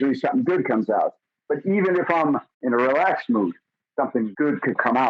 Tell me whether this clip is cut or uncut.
cut